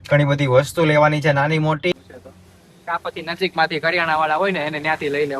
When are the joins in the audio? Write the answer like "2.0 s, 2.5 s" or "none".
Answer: 1.9 s